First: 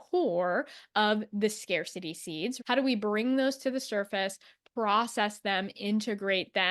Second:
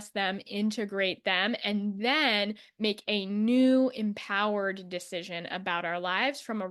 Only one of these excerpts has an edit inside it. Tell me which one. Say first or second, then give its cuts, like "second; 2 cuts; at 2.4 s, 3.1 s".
first; 1 cut; at 2.6 s